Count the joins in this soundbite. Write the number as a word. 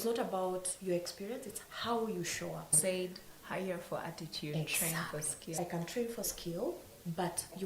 two